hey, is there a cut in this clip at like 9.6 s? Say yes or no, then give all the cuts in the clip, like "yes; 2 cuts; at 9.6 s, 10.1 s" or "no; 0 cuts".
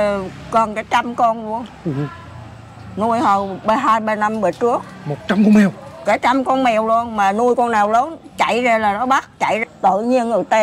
yes; 1 cut; at 9.6 s